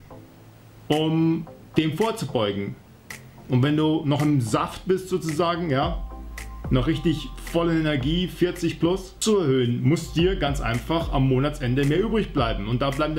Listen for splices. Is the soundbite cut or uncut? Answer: cut